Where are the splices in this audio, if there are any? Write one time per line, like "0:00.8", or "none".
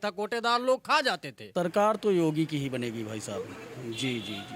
0:01.3